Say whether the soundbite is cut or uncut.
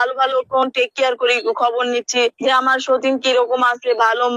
cut